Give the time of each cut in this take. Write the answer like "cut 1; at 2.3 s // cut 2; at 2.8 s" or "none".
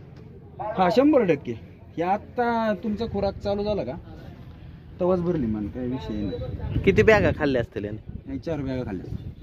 none